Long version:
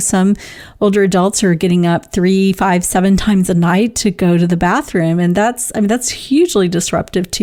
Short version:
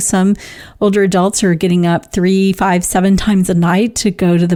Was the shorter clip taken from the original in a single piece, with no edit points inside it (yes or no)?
yes